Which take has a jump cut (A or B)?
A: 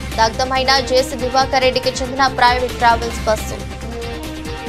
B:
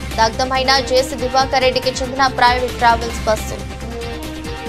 A